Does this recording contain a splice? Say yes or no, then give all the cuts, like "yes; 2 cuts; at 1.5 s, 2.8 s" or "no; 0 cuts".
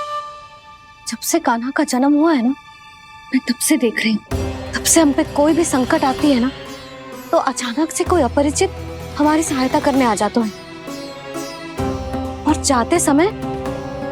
yes; 1 cut; at 1.0 s